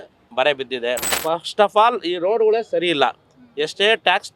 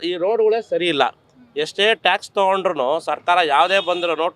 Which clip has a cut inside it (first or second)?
first